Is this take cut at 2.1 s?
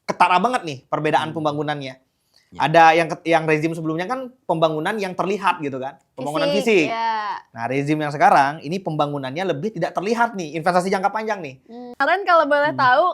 no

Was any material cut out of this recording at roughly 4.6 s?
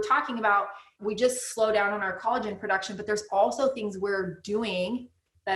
no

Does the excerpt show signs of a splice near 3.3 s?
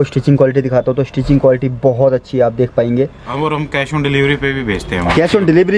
yes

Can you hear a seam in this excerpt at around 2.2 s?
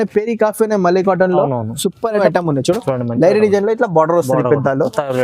yes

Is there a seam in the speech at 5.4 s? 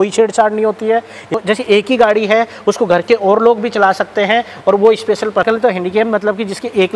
yes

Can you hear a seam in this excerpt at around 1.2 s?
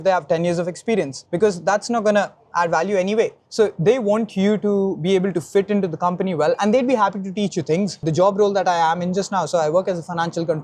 no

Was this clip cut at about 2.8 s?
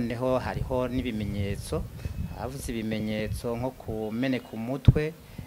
no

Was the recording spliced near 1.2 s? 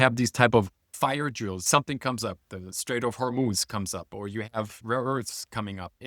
yes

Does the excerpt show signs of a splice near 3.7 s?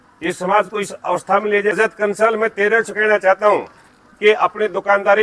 no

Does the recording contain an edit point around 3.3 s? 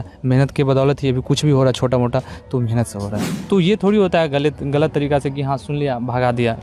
yes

